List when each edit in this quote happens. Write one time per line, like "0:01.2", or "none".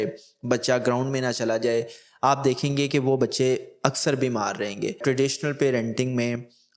0:05.0